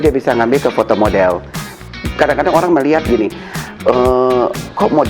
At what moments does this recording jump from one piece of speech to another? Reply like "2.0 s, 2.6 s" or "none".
1.6 s